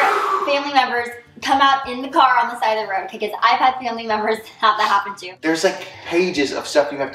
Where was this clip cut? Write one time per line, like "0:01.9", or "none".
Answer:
0:05.2